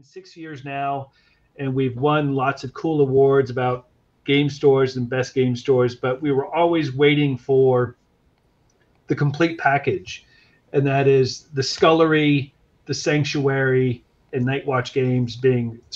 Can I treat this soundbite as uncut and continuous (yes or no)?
yes